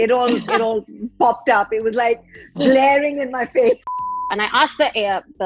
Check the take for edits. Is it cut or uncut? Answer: cut